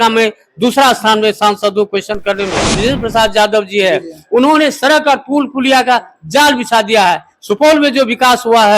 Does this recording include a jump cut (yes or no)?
yes